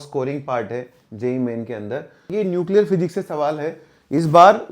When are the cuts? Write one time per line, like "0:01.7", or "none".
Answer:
0:02.3